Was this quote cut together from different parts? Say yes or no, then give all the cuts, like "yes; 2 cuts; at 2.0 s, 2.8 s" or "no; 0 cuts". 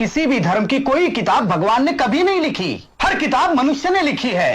no; 0 cuts